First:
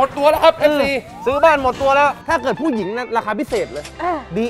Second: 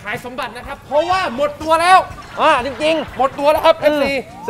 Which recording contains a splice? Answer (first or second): first